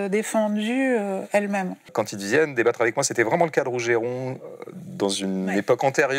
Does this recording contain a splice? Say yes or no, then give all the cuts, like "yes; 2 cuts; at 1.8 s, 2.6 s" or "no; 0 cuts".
yes; 1 cut; at 1.9 s